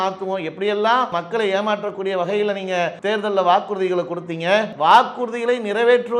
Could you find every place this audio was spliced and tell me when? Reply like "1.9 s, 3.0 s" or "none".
1.1 s, 3.0 s, 4.7 s